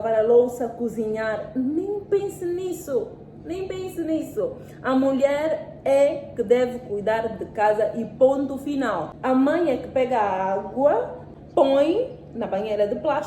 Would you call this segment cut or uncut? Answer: cut